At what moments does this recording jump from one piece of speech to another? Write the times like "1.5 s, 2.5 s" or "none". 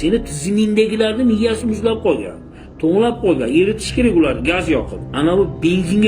5.1 s

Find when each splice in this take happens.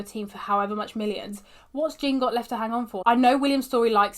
2.9 s

